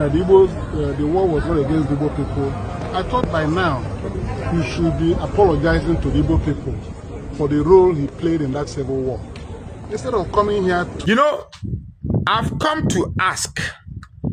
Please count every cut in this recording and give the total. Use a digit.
1